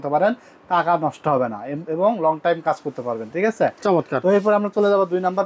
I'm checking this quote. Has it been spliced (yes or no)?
no